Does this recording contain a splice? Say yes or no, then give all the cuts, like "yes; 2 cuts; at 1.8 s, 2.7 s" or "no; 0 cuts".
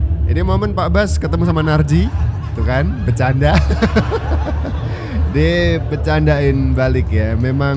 no; 0 cuts